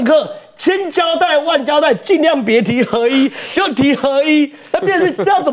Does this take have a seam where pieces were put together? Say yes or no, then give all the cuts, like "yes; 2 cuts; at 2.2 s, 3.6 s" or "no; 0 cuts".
yes; 1 cut; at 4.6 s